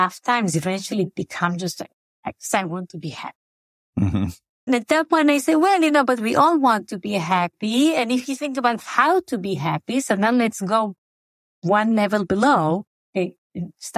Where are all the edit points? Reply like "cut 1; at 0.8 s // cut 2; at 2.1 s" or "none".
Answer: cut 1; at 4.6 s

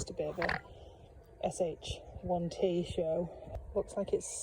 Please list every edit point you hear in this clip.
cut 1; at 3.4 s

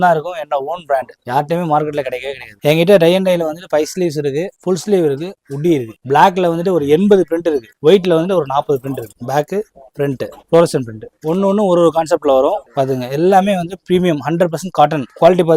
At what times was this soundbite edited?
cut 1; at 2.6 s // cut 2; at 5.9 s // cut 3; at 9.2 s // cut 4; at 12.6 s

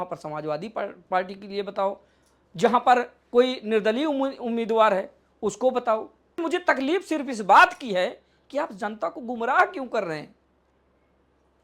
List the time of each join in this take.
cut 1; at 6.4 s

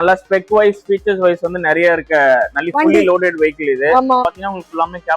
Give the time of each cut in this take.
cut 1; at 4.2 s

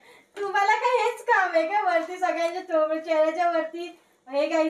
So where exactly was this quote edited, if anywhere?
none

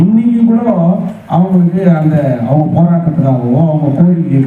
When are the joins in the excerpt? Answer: none

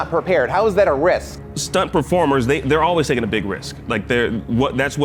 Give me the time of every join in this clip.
none

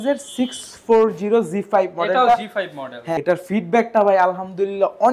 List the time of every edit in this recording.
cut 1; at 3.2 s

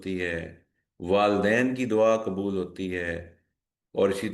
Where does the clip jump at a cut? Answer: none

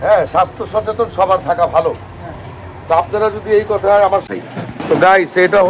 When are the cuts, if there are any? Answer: cut 1; at 4.3 s

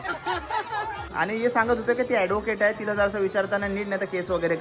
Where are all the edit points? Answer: cut 1; at 1.0 s

